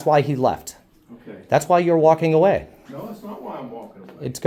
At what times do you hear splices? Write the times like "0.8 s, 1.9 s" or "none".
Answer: none